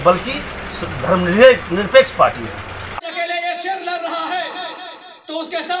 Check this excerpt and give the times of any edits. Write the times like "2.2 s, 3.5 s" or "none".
2.9 s